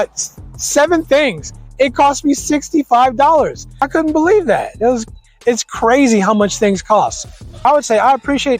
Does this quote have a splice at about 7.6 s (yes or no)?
yes